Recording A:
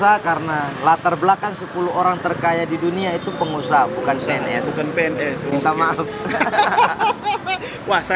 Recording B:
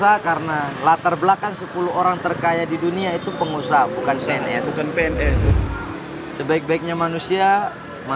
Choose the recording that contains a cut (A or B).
B